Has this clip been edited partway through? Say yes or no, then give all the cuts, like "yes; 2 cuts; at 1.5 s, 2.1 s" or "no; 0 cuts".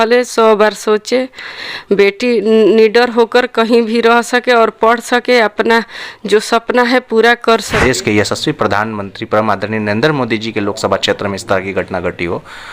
yes; 1 cut; at 7.8 s